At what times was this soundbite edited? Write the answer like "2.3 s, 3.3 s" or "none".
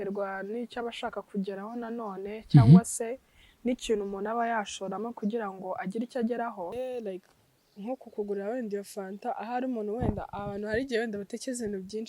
6.8 s